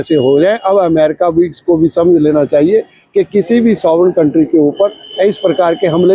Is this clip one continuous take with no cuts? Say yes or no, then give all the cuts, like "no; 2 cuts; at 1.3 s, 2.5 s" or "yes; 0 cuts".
yes; 0 cuts